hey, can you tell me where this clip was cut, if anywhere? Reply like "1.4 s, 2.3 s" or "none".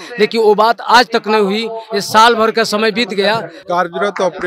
3.5 s